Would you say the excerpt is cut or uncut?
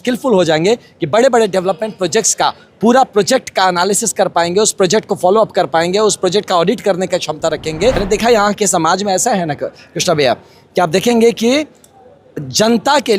cut